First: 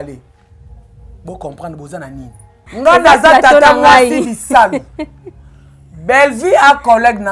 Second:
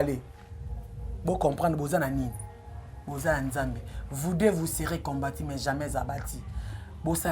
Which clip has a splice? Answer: first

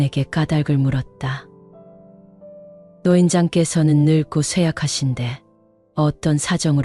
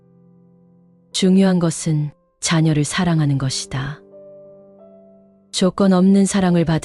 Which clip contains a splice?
second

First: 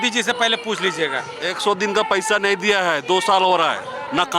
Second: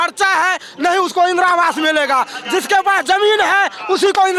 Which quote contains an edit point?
first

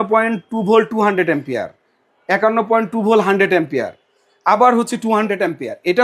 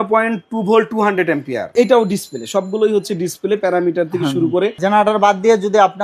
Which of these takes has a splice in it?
second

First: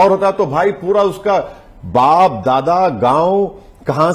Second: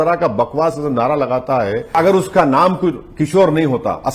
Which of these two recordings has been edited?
second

